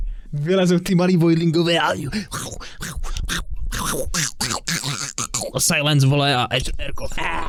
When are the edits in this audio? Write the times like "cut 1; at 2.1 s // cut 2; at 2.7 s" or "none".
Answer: none